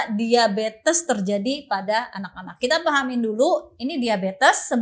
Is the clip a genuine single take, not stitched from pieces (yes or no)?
yes